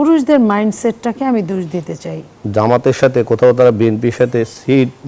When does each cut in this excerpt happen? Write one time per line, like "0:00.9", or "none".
0:02.4